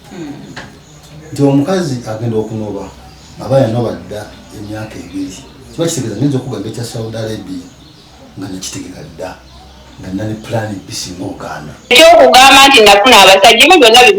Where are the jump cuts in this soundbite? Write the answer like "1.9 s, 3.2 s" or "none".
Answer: 11.9 s